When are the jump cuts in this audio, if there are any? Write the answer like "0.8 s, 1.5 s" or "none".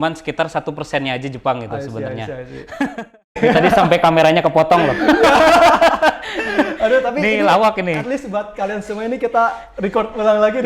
3.4 s